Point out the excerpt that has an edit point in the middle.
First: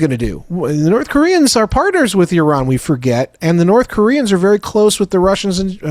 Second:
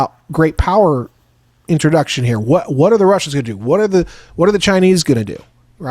second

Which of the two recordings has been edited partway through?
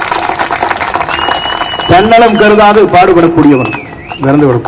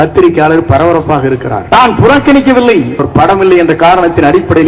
second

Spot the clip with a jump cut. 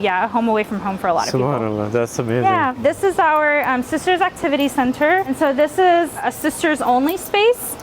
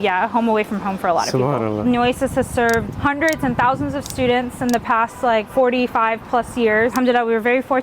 second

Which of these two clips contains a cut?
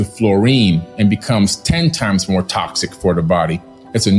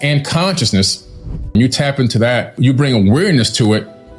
second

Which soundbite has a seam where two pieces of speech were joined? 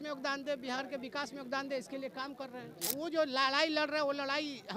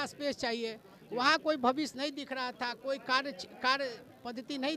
first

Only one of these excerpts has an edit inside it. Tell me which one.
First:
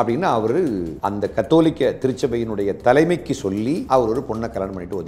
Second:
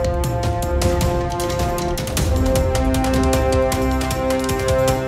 first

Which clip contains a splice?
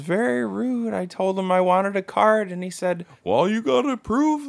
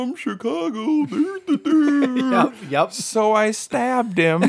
first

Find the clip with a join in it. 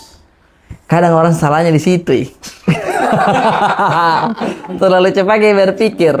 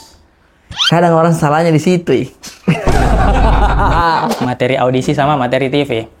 second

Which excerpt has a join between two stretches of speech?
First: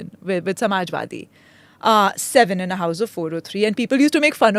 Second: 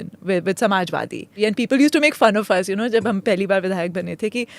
second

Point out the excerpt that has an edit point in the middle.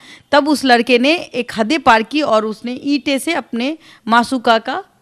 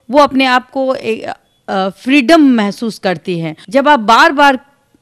second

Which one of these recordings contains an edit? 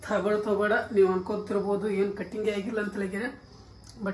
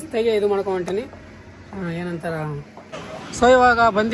second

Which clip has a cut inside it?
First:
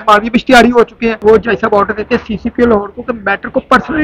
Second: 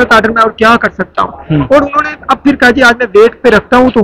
first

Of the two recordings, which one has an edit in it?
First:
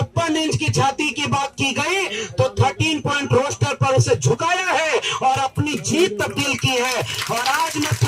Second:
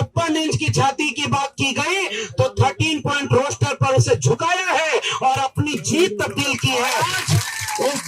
second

